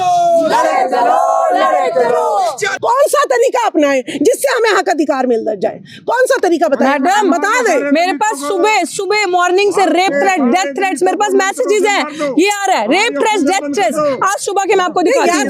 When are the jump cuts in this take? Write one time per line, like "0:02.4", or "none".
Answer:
0:02.7